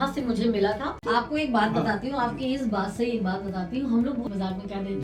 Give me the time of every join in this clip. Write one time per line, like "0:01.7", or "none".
0:00.9
0:04.3